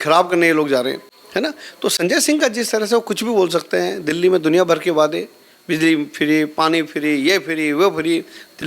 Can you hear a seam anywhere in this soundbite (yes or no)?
no